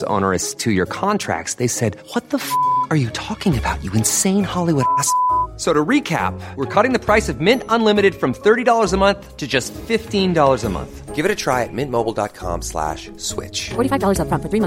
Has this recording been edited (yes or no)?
no